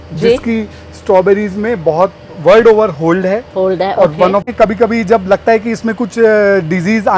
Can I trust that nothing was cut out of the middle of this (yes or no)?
no